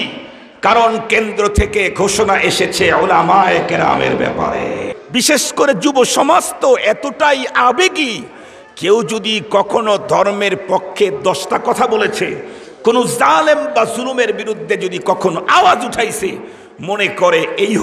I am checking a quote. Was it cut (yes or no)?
yes